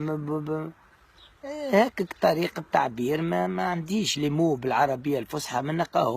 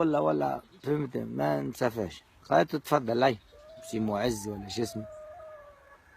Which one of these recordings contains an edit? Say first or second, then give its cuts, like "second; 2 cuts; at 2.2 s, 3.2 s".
first; 1 cut; at 1.8 s